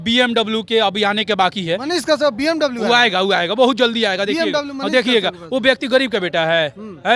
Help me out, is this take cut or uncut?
uncut